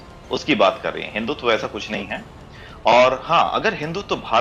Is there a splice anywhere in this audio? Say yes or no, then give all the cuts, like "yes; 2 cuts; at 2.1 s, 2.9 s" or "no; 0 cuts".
no; 0 cuts